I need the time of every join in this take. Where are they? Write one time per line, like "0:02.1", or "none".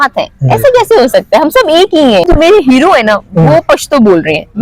0:02.3